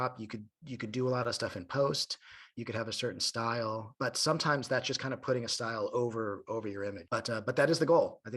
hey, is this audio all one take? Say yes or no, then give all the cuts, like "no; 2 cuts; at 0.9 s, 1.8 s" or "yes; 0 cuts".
no; 2 cuts; at 3.9 s, 7.0 s